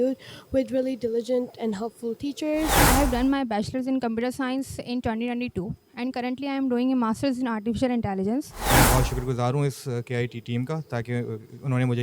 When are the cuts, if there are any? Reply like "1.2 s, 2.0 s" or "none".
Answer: 2.8 s, 8.6 s

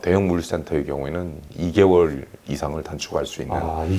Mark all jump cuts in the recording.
none

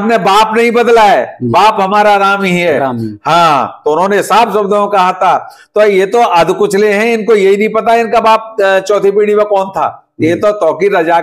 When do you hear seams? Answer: none

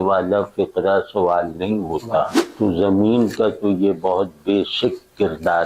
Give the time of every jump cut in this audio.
2.4 s

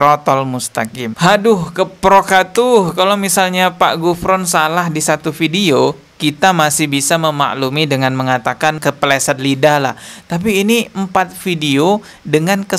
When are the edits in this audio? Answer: 1.1 s, 8.8 s

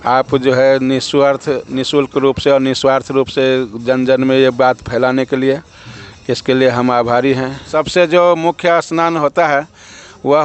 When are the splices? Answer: 7.6 s

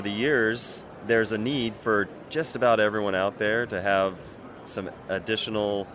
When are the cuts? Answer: none

